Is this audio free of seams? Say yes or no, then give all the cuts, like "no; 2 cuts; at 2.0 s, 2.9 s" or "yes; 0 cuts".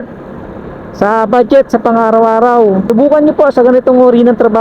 no; 1 cut; at 2.9 s